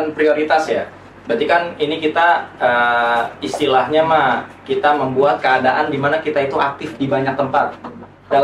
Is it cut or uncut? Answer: uncut